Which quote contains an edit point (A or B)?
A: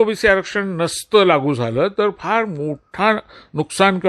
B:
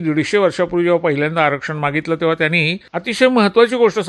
B